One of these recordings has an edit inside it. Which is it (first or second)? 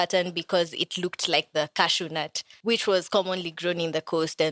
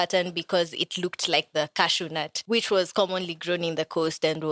second